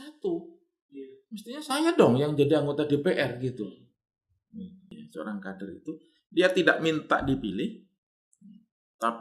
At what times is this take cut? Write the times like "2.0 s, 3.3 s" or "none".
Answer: 4.9 s